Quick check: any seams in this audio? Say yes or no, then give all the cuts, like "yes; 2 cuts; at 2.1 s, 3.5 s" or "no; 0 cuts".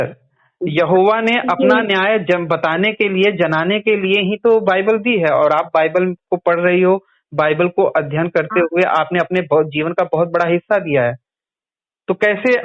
no; 0 cuts